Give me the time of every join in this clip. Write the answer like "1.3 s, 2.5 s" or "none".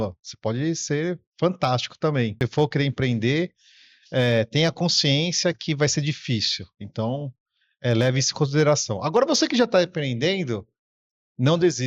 2.3 s